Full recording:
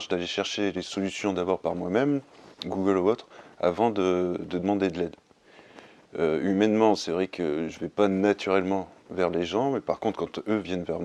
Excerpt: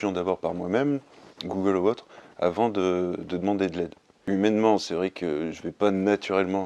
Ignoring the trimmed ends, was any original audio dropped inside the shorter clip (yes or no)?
yes